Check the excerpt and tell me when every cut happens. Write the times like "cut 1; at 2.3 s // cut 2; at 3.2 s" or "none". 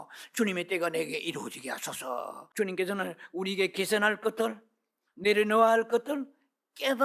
cut 1; at 2.5 s